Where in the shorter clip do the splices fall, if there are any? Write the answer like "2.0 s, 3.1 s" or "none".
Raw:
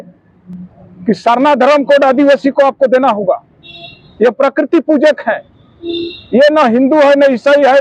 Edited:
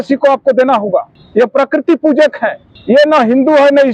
1.2 s, 2.7 s